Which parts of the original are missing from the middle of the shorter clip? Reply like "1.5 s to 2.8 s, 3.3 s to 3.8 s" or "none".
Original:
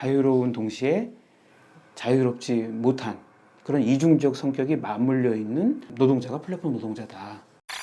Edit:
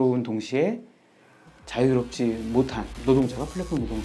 3.2 s to 5.9 s